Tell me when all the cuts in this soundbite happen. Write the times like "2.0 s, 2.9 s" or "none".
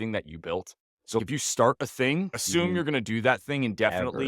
1.2 s, 2.4 s